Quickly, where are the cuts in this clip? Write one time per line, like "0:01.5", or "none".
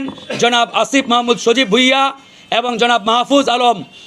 none